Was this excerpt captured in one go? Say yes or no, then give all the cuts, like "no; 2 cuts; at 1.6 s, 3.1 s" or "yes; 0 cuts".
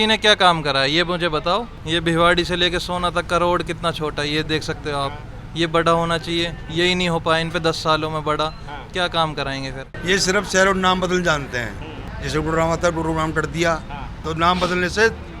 no; 3 cuts; at 1.8 s, 10.0 s, 14.2 s